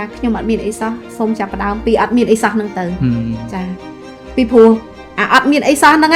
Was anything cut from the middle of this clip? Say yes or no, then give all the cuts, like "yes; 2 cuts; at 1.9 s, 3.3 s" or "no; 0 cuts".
no; 0 cuts